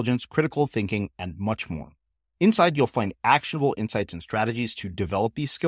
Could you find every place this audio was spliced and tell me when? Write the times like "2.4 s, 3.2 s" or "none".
none